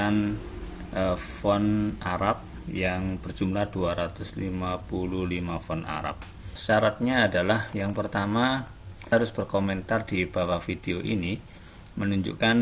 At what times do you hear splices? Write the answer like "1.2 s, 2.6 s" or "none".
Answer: 6.5 s, 9.1 s